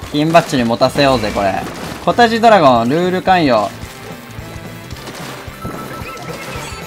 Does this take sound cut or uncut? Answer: uncut